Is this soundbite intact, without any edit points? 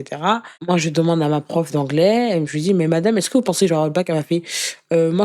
yes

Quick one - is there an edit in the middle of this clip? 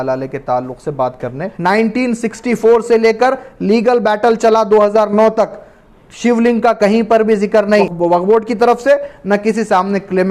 yes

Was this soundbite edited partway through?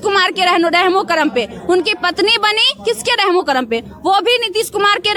no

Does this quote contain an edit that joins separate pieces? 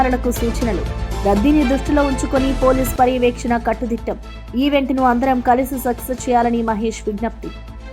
no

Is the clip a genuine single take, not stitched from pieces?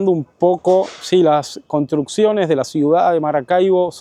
yes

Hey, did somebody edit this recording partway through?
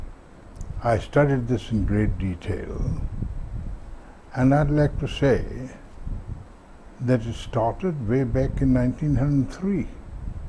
no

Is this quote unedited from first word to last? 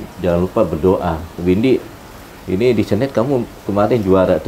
no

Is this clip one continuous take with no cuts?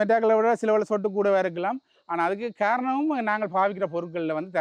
yes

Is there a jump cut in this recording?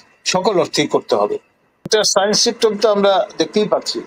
yes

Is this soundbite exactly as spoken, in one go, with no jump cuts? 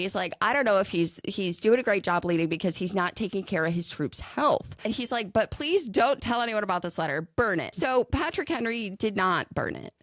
no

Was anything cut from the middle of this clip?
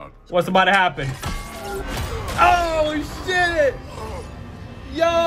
no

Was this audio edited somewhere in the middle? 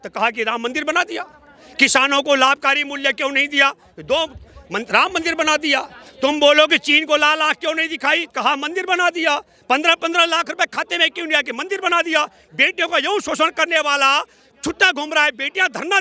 no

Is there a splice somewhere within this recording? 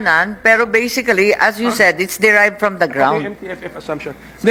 no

